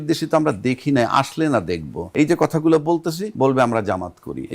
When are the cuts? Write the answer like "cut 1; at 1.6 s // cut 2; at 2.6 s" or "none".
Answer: cut 1; at 2.0 s // cut 2; at 3.3 s